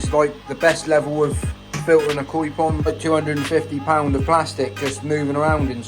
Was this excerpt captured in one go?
no; 1 cut; at 2.9 s

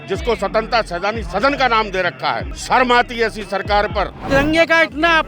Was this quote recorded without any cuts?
no; 2 cuts; at 2.5 s, 4.2 s

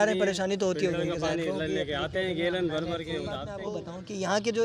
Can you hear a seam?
yes; 1 cut; at 3.5 s

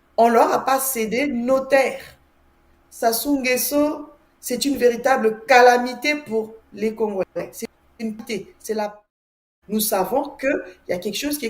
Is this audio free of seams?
no; 1 cut; at 9.1 s

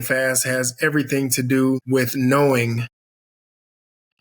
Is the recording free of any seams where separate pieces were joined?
no; 1 cut; at 1.8 s

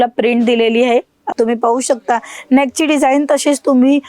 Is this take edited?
yes; 1 cut; at 1.3 s

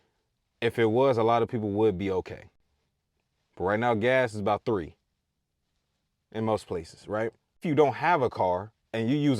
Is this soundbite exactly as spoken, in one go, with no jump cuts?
no; 1 cut; at 7.6 s

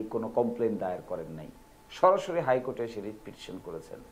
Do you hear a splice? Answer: no; 0 cuts

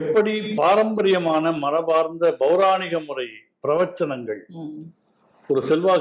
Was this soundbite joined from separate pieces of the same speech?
no; 0 cuts

